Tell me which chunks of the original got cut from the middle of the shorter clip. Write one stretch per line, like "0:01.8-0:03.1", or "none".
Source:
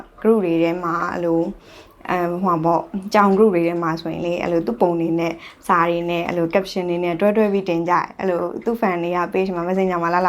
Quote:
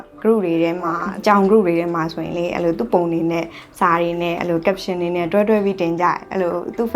0:01.1-0:02.9